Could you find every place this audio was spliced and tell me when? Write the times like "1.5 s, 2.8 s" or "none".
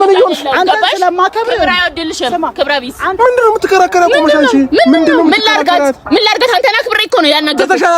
3.2 s